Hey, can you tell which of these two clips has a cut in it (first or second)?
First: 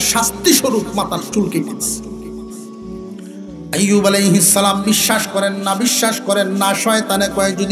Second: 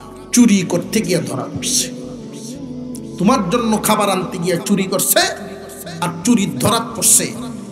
first